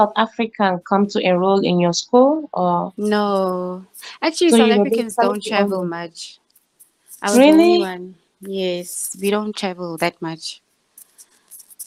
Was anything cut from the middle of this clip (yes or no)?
no